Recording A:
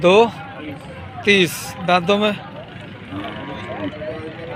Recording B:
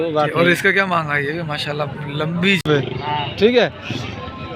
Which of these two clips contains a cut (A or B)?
B